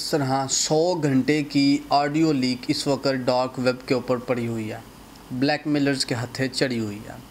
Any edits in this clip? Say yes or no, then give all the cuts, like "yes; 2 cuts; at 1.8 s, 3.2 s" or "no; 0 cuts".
no; 0 cuts